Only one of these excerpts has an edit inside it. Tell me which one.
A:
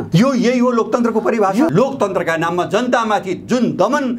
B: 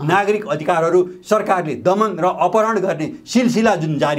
A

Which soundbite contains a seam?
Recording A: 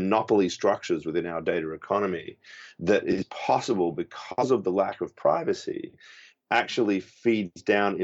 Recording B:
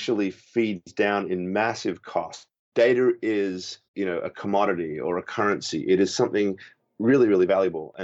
B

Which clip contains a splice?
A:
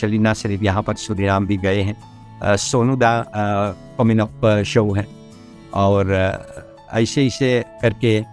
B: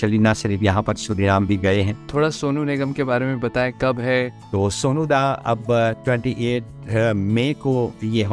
B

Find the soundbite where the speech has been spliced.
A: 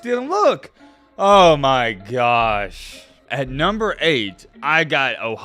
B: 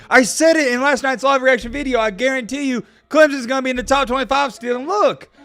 A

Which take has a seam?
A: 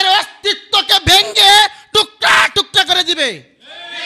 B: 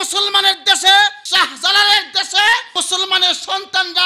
B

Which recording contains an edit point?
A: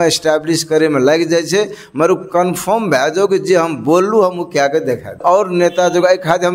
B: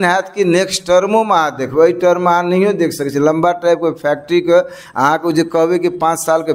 A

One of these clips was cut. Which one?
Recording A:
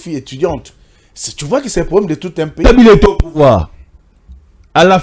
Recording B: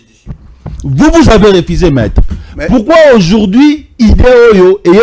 A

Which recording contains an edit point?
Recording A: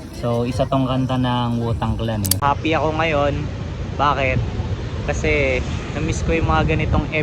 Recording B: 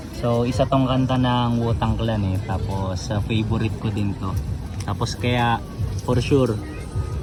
A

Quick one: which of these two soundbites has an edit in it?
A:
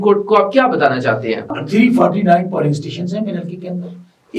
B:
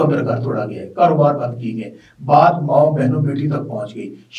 A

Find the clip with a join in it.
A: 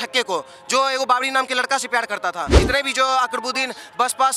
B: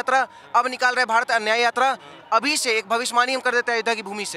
A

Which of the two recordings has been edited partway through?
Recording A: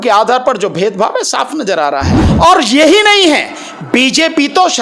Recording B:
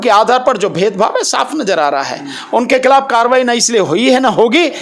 A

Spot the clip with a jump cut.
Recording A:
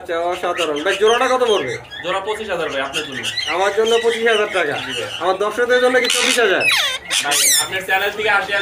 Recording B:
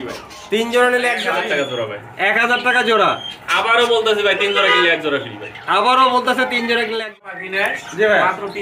B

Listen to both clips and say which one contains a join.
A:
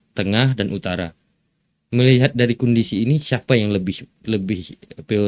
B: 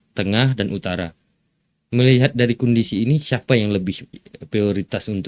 B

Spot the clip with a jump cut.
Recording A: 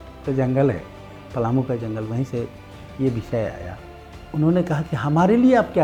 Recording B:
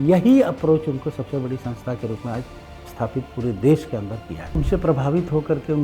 B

